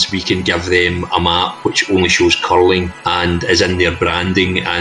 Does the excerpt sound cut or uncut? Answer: cut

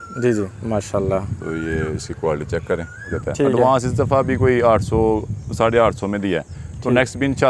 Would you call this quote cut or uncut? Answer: cut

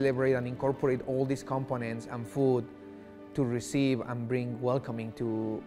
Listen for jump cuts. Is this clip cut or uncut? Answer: uncut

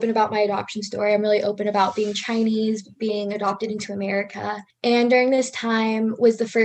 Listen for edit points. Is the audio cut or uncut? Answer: cut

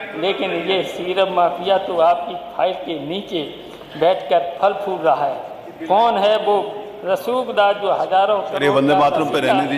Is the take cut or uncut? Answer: uncut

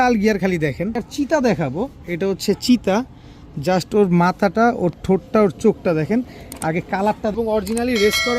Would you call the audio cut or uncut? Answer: cut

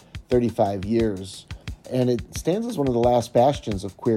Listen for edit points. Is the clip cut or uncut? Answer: cut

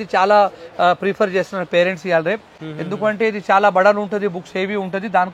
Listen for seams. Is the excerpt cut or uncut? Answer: uncut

